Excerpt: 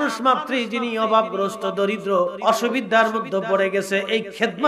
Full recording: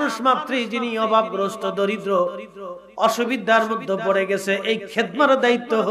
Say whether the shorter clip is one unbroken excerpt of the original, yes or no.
no